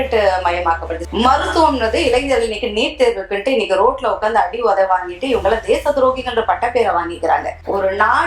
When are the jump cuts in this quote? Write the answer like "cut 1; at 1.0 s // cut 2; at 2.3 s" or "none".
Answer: cut 1; at 1.0 s